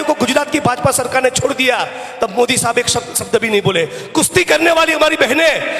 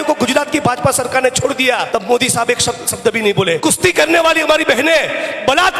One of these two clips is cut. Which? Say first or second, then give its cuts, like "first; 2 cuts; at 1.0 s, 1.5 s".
second; 2 cuts; at 1.9 s, 3.6 s